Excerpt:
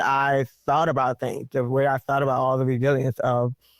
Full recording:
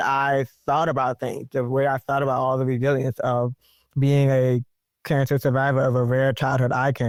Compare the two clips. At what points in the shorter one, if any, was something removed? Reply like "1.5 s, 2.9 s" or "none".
none